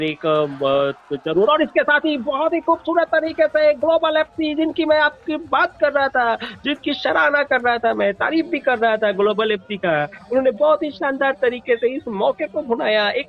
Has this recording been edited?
no; 0 cuts

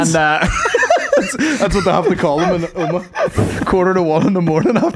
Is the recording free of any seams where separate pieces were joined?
no; 1 cut; at 3.4 s

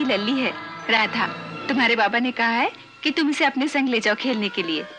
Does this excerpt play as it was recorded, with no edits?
no; 1 cut; at 1.5 s

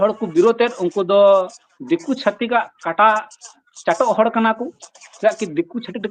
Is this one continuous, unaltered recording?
yes; 0 cuts

